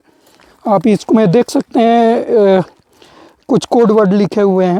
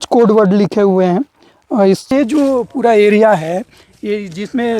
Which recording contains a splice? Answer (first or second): second